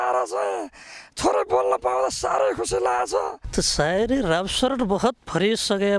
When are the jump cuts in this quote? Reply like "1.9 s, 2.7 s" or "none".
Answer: 3.4 s